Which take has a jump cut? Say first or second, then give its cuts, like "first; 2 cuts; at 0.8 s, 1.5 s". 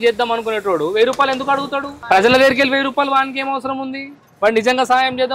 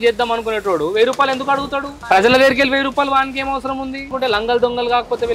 second; 1 cut; at 4.1 s